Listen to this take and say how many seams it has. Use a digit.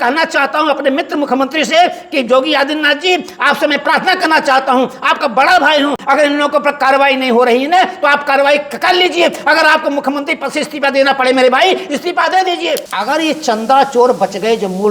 2